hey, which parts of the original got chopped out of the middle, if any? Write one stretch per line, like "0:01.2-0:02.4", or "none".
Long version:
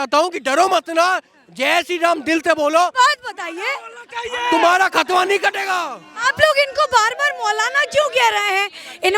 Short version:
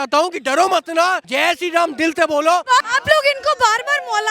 0:01.2-0:01.5
0:03.1-0:06.2